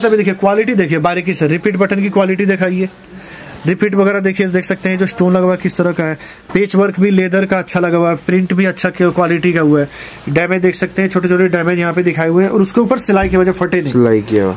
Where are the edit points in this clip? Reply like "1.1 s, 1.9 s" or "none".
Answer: none